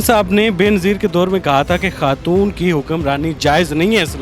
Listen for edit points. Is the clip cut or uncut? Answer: uncut